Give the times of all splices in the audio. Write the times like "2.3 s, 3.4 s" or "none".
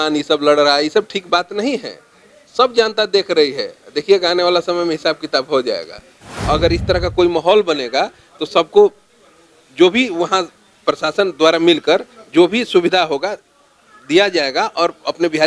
6.3 s